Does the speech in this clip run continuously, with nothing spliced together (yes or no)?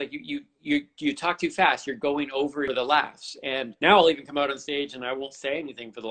no